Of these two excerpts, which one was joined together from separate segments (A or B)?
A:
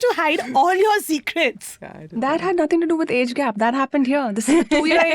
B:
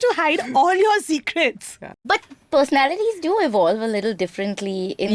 B